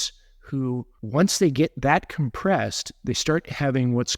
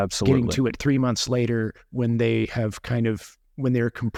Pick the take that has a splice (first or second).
first